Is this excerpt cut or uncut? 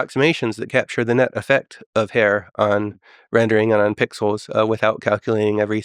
uncut